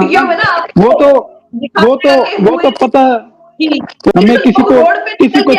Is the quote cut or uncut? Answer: cut